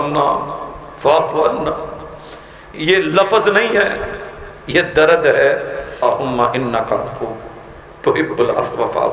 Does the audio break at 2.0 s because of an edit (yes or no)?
no